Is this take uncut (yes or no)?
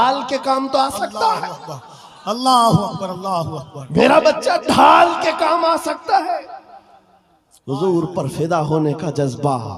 yes